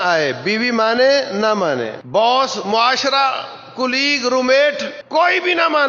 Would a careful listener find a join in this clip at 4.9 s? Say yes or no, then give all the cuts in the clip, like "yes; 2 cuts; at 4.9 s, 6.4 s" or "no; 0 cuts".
yes; 2 cuts; at 2.0 s, 4.9 s